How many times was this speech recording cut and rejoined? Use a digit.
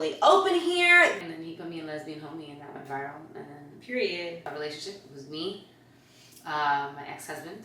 2